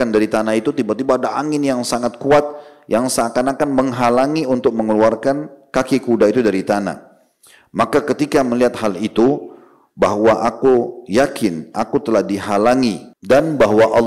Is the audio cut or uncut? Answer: cut